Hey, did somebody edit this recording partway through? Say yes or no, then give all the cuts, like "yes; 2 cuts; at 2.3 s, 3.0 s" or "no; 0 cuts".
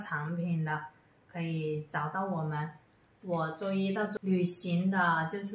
yes; 1 cut; at 4.1 s